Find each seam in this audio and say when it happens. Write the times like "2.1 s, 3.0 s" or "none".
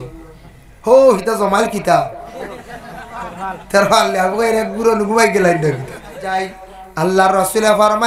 6.3 s

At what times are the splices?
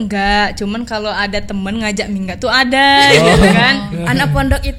3.9 s

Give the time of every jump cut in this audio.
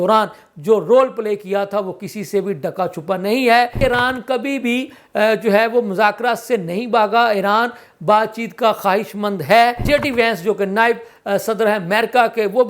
3.8 s, 9.8 s

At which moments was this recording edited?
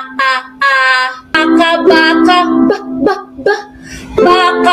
1.4 s

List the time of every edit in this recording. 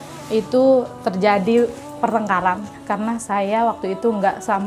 2.7 s

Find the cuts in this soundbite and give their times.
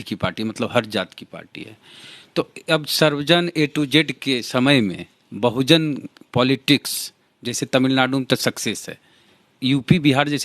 none

